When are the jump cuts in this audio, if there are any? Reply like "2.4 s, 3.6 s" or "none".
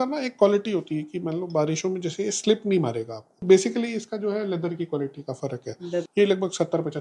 3.4 s, 6.1 s